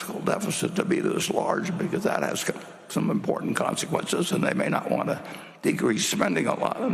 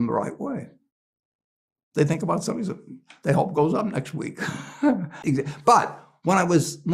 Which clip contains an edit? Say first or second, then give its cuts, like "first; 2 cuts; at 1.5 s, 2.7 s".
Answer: second; 1 cut; at 5.2 s